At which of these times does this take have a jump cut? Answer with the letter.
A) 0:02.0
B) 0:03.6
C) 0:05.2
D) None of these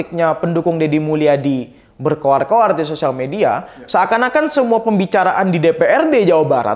D